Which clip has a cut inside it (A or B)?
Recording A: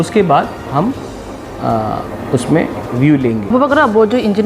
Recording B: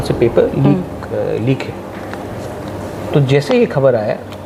A